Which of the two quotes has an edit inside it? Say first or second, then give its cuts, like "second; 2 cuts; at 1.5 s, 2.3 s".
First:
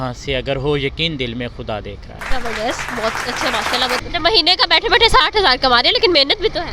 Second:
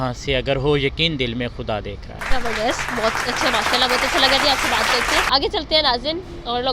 first; 1 cut; at 4.0 s